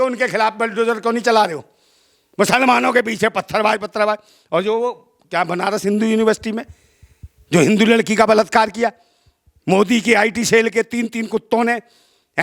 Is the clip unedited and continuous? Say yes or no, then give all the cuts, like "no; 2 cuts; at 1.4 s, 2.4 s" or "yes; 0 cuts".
yes; 0 cuts